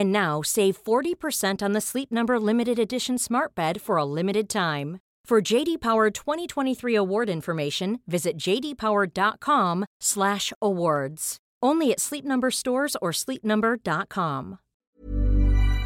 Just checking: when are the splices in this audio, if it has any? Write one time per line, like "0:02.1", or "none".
0:14.7